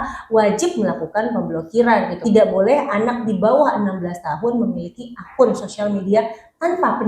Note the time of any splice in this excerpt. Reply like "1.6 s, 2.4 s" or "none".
2.2 s